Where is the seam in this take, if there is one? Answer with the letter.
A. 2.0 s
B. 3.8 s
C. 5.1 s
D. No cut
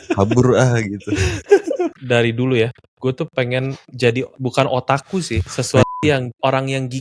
A